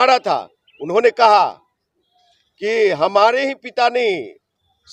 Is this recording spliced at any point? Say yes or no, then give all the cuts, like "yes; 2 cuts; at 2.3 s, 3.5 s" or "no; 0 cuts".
no; 0 cuts